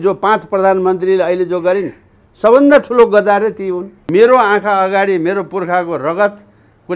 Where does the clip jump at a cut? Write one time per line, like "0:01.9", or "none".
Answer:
0:03.9

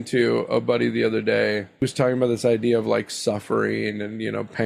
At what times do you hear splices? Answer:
0:01.7

